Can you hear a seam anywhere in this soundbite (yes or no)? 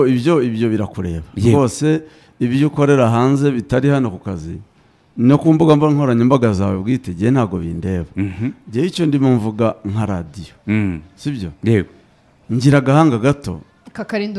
no